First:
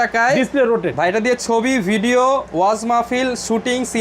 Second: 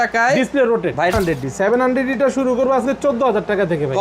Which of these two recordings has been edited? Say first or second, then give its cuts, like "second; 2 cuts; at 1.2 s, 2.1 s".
second; 1 cut; at 1.1 s